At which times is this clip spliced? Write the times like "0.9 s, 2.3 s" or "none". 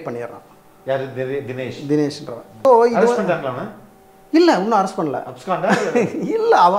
2.7 s